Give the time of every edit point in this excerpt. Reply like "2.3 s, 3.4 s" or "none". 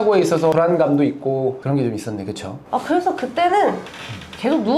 2.5 s